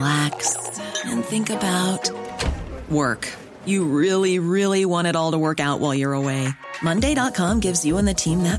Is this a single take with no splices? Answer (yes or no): yes